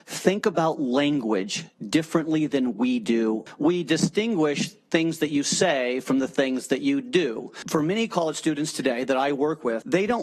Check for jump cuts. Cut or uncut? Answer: cut